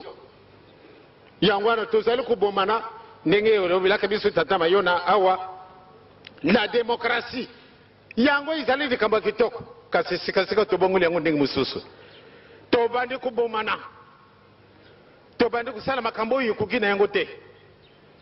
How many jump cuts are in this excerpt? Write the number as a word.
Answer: zero